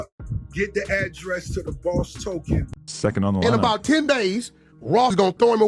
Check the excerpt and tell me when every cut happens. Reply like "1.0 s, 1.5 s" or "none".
2.8 s